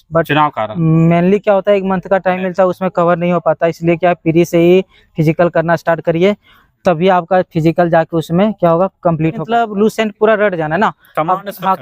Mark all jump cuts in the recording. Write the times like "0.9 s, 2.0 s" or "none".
9.4 s